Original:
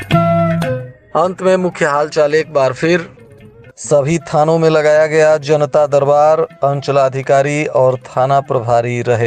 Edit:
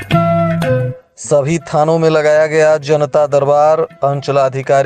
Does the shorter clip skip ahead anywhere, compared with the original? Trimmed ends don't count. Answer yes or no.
yes